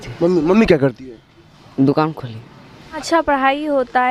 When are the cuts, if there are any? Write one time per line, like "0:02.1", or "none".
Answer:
0:03.0